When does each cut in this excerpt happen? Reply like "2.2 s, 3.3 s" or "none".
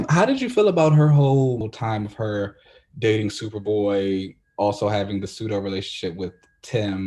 1.7 s